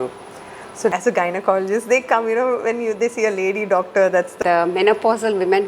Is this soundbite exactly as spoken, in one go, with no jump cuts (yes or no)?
no